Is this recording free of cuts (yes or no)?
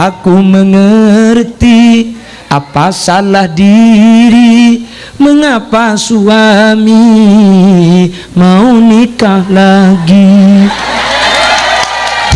yes